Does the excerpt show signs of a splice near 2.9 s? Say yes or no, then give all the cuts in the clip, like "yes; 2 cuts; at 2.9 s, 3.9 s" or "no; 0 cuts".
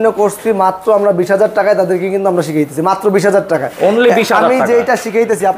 no; 0 cuts